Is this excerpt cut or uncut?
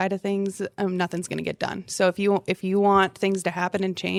uncut